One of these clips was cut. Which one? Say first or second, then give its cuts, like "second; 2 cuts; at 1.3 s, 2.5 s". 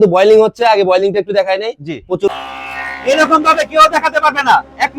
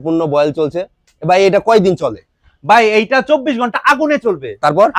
first; 1 cut; at 2.3 s